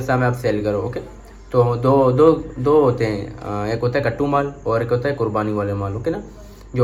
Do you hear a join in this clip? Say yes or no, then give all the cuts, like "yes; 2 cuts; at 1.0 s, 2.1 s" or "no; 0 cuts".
no; 0 cuts